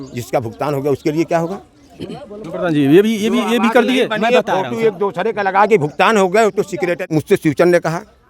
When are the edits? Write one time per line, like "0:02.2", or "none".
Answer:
0:07.0